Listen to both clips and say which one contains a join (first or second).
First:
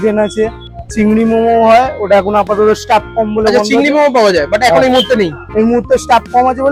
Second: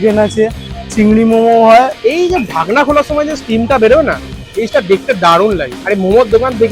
second